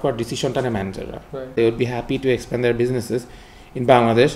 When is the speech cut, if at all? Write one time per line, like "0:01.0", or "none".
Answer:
0:01.5